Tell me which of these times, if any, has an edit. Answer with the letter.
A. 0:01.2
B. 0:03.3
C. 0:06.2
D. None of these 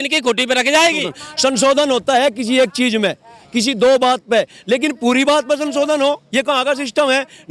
A